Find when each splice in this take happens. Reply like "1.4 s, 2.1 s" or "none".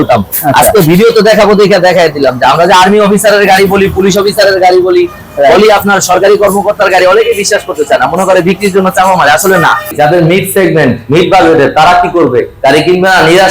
9.9 s